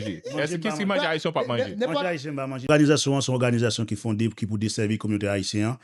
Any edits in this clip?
yes; 1 cut; at 2.7 s

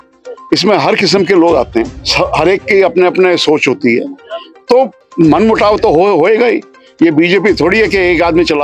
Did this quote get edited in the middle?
yes; 2 cuts; at 2.0 s, 5.0 s

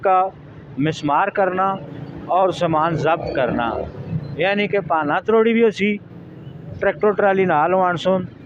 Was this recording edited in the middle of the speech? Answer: no; 0 cuts

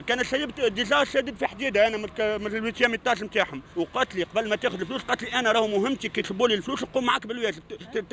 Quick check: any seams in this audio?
yes; 1 cut; at 3.6 s

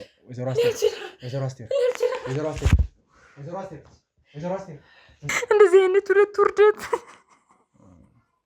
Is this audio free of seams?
no; 1 cut; at 5.3 s

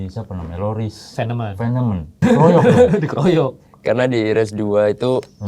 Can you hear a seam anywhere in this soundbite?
yes; 1 cut; at 2.2 s

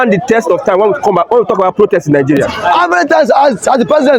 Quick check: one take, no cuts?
no; 1 cut; at 2.6 s

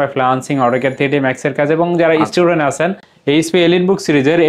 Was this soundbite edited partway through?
yes; 1 cut; at 3.1 s

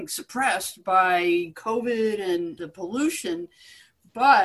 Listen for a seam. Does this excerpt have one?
yes; 2 cuts; at 1.6 s, 2.6 s

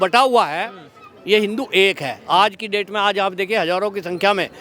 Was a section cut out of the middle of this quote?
no; 0 cuts

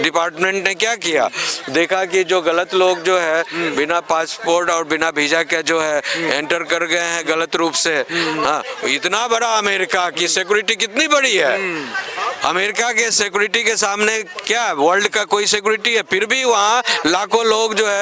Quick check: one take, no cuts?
yes; 0 cuts

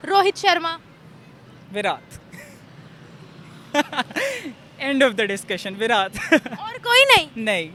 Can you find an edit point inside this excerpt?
no; 0 cuts

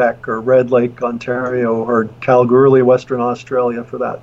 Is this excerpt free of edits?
yes; 0 cuts

